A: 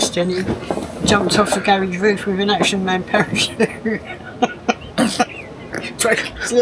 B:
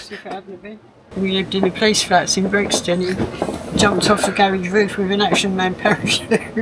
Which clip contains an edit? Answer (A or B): B